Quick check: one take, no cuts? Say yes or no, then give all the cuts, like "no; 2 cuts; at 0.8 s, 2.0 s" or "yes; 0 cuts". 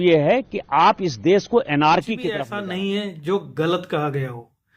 no; 1 cut; at 2.4 s